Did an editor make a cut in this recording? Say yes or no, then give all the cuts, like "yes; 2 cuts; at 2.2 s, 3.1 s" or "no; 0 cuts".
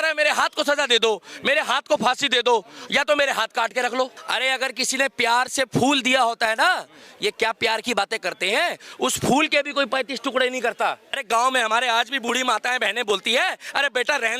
yes; 2 cuts; at 4.2 s, 11.2 s